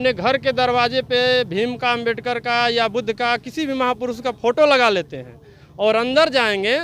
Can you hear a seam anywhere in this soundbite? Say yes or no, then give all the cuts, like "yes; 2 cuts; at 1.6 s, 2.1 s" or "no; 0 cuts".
no; 0 cuts